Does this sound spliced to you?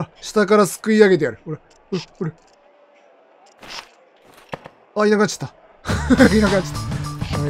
no; 0 cuts

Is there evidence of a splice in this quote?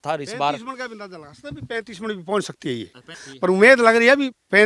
yes; 1 cut; at 3.2 s

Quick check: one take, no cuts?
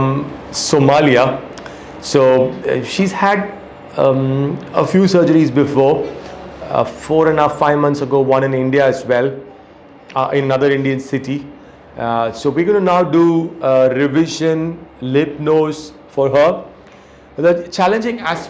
yes; 0 cuts

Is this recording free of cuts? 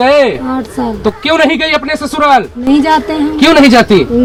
yes; 0 cuts

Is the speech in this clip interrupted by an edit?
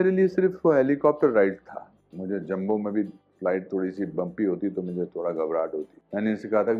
yes; 3 cuts; at 1.9 s, 3.2 s, 6.0 s

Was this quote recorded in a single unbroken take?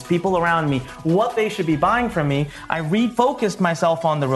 no; 1 cut; at 3.1 s

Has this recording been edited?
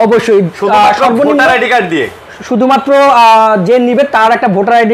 no; 0 cuts

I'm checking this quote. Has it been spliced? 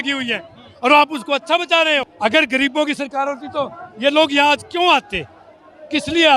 yes; 1 cut; at 2.1 s

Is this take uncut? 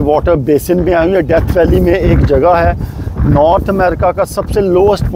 yes; 0 cuts

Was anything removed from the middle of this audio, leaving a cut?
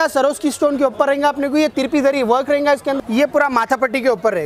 yes; 1 cut; at 2.9 s

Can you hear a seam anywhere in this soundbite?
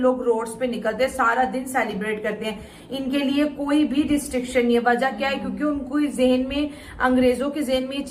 no; 0 cuts

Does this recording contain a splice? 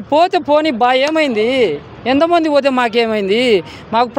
no; 0 cuts

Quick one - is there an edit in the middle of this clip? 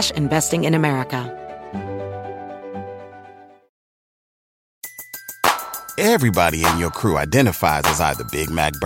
yes; 1 cut; at 1.3 s

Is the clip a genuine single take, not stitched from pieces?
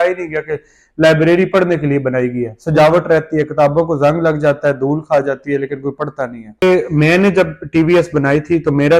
no; 1 cut; at 6.6 s

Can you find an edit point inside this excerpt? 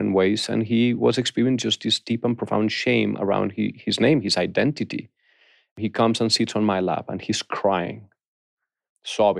yes; 1 cut; at 5.8 s

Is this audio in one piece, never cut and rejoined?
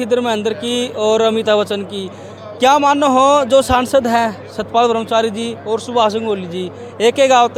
yes; 0 cuts

